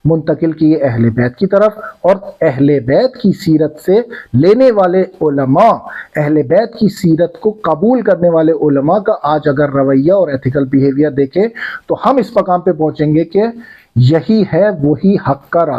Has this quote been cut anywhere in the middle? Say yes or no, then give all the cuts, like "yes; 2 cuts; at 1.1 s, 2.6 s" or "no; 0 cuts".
no; 0 cuts